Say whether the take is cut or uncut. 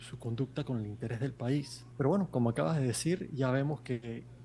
cut